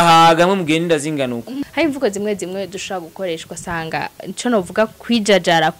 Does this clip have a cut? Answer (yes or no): yes